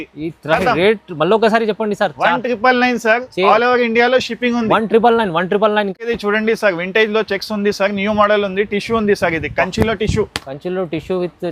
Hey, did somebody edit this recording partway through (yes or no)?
yes